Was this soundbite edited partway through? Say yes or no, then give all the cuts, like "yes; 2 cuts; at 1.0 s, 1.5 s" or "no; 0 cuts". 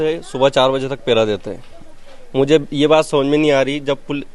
no; 0 cuts